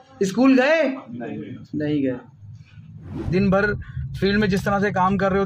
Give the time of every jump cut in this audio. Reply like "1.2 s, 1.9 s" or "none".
3.3 s